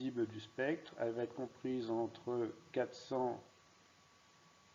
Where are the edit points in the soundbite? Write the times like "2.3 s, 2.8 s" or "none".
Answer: none